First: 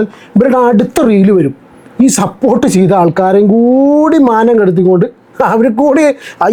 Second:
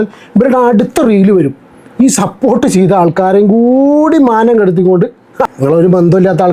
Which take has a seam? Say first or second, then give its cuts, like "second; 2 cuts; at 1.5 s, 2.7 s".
second; 1 cut; at 5.5 s